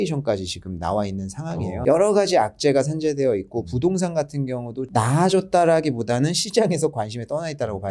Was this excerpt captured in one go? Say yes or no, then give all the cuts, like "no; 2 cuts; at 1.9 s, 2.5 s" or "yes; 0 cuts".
no; 2 cuts; at 1.8 s, 4.9 s